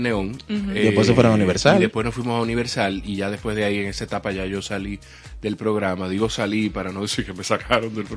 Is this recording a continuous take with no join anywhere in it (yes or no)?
yes